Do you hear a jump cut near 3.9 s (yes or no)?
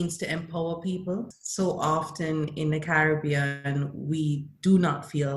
no